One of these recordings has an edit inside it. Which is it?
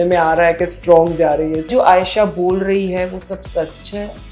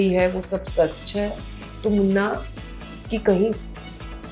first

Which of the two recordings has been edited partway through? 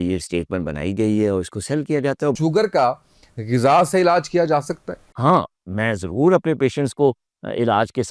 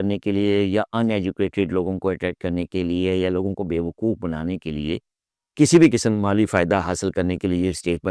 first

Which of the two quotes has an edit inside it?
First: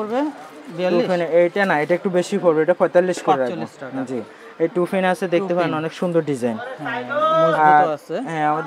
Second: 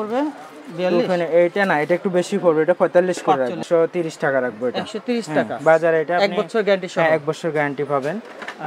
second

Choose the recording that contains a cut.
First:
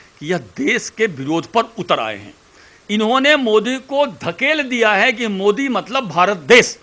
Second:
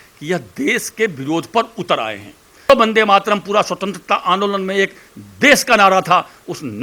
second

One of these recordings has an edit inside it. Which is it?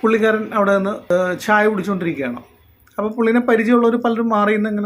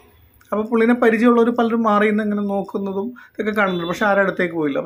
first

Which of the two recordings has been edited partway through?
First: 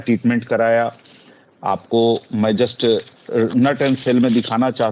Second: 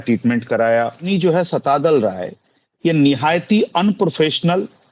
second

